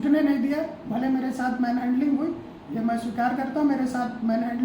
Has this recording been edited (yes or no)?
no